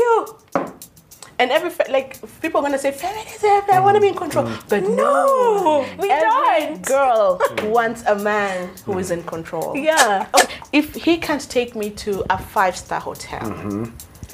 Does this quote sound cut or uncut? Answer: cut